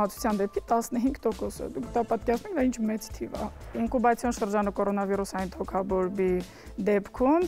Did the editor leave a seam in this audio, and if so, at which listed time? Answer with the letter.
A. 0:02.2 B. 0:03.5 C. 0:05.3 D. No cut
B